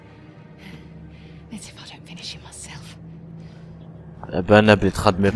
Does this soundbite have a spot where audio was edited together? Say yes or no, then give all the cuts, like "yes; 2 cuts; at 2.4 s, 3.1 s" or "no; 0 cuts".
yes; 1 cut; at 4.2 s